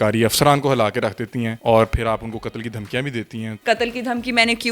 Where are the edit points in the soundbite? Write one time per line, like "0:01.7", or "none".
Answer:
0:01.5
0:03.5